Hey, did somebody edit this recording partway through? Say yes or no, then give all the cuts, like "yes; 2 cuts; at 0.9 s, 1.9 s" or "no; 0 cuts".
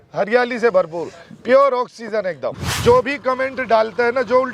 yes; 1 cut; at 2.5 s